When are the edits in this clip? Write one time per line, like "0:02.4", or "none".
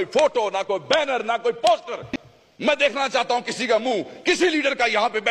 none